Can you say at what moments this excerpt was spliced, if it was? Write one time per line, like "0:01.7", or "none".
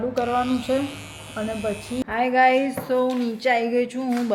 0:02.0